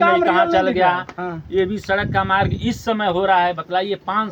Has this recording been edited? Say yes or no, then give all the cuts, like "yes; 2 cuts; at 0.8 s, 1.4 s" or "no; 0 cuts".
no; 0 cuts